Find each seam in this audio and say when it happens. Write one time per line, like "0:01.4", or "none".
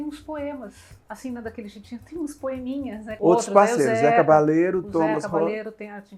0:03.0